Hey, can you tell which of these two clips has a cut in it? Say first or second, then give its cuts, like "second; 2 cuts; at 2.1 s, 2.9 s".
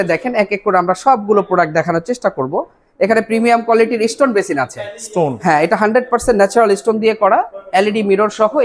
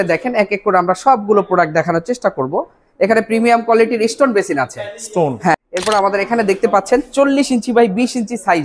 second; 1 cut; at 5.5 s